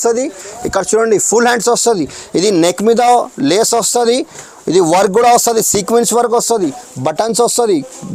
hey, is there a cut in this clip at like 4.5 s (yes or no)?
no